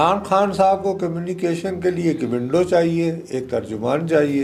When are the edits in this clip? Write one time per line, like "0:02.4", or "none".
none